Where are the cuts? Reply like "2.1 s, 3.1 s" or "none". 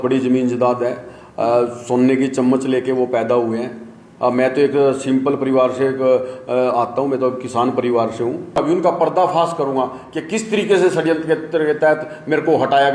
8.5 s